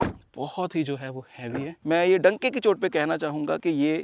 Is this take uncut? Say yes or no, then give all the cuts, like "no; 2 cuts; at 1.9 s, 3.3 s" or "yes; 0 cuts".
no; 1 cut; at 1.8 s